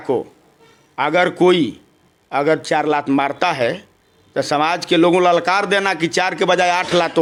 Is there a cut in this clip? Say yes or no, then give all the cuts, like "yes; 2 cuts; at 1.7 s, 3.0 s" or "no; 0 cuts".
no; 0 cuts